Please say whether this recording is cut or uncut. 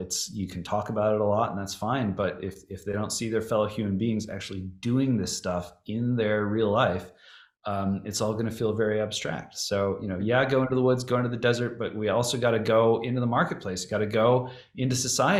uncut